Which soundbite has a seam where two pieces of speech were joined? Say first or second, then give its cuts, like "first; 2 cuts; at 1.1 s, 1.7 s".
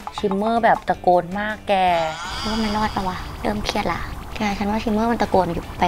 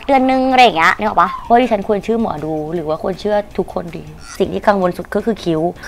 second; 2 cuts; at 1.4 s, 4.2 s